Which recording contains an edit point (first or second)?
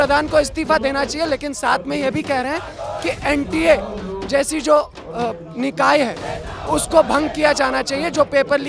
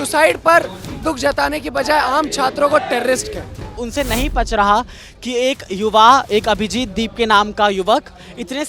second